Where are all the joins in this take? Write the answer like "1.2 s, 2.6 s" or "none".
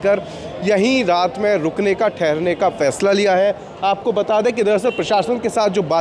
none